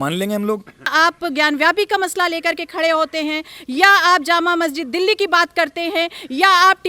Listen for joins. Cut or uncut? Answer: cut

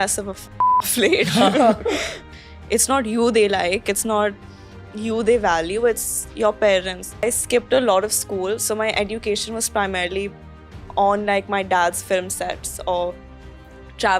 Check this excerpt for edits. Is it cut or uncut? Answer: cut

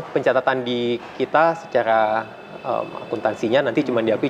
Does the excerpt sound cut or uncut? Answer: uncut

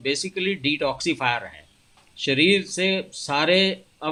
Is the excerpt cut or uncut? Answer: uncut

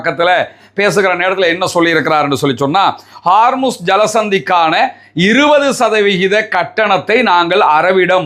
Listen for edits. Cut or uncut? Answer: uncut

